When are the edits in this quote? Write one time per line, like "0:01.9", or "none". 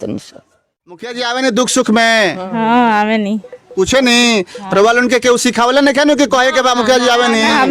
0:01.1